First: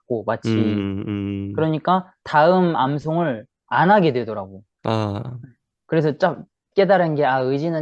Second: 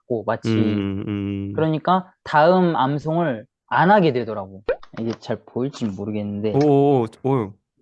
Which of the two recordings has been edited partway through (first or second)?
second